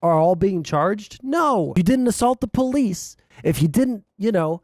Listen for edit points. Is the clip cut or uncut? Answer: cut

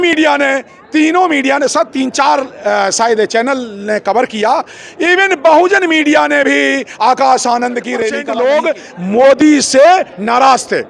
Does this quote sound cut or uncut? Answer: cut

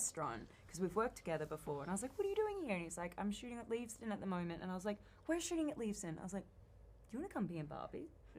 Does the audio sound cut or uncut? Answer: uncut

